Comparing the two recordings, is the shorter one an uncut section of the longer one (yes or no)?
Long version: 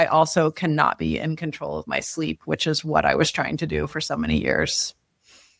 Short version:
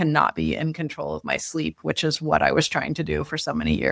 yes